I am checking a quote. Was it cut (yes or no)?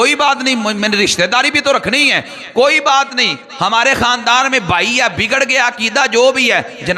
no